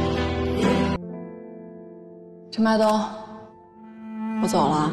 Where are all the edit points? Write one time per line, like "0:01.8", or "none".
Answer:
0:01.0